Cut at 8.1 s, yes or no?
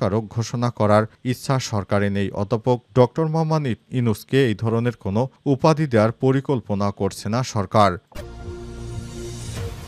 yes